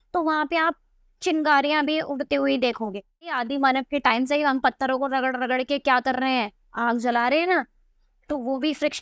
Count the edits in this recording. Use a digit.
1